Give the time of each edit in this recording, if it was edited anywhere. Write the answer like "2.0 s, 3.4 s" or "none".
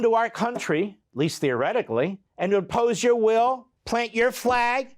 1.0 s, 2.2 s, 3.7 s